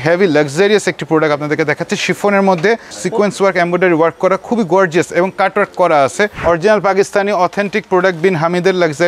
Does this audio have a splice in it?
yes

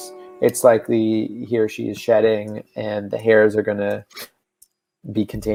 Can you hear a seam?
no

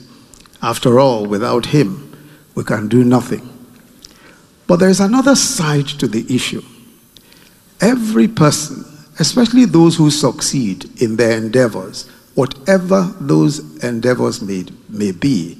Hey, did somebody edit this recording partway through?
no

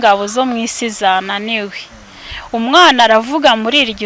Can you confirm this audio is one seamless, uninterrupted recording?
yes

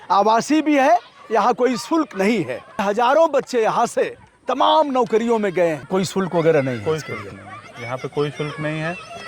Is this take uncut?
no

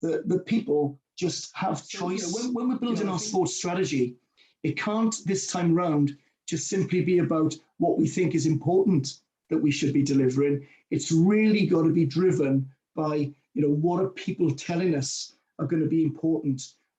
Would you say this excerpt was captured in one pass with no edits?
no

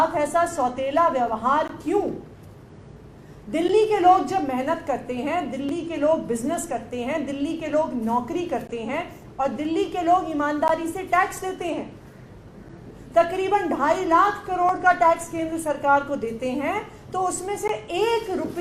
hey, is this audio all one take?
yes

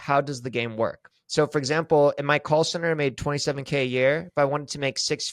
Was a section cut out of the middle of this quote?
yes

